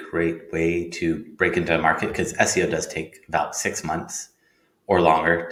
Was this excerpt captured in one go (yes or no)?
yes